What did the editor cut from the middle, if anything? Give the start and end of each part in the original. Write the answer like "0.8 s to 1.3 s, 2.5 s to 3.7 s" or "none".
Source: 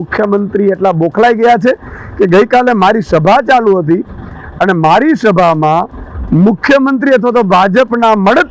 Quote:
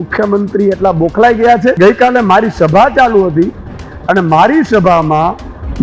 1.8 s to 2.3 s

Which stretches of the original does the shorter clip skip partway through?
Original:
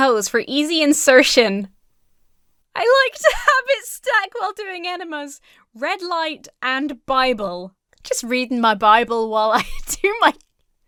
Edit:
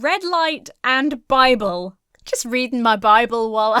none

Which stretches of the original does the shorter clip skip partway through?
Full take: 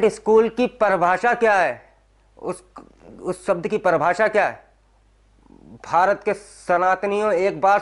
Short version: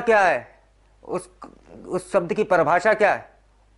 none

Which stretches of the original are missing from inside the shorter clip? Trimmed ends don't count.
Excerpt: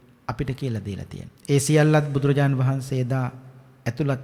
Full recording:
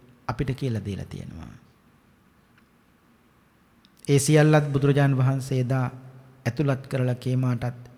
1.3 s to 3.9 s

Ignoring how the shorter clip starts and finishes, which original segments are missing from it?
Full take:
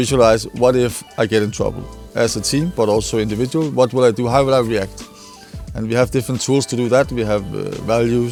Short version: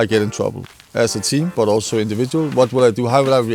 none

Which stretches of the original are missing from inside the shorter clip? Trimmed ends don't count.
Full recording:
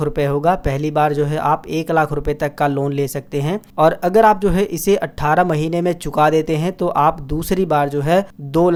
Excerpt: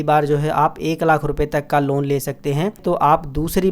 3.7 s to 6.7 s

